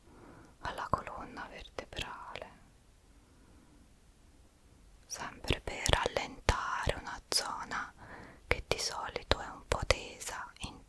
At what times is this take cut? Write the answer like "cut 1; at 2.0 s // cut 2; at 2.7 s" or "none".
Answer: none